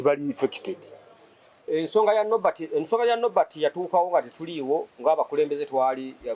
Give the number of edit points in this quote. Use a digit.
1